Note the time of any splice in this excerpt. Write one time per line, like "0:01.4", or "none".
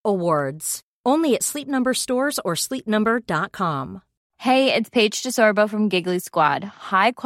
0:04.2